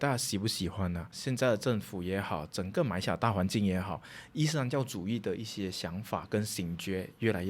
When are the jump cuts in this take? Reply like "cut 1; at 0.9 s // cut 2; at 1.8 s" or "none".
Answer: cut 1; at 1.1 s